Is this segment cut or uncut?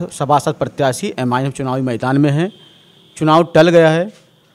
uncut